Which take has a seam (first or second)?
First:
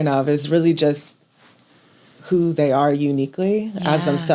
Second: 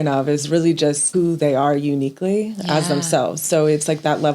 second